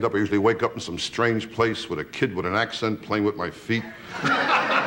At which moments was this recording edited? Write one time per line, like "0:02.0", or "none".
none